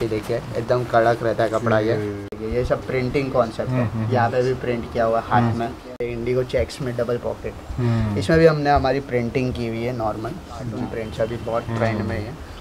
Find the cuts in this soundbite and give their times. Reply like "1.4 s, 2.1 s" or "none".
2.4 s, 6.0 s, 10.7 s